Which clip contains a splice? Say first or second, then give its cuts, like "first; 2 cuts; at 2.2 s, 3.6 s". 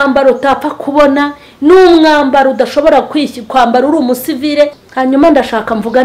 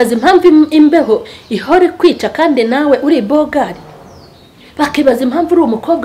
first; 1 cut; at 4.8 s